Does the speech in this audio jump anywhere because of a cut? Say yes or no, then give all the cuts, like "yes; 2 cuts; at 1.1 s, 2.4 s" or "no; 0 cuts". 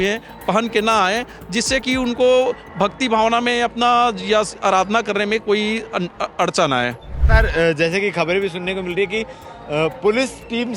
yes; 1 cut; at 7.2 s